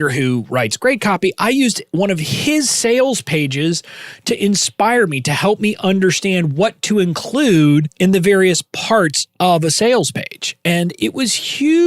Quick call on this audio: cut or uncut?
cut